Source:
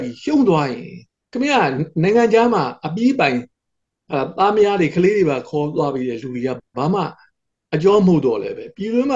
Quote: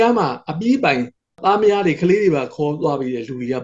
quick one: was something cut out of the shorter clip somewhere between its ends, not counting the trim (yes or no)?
yes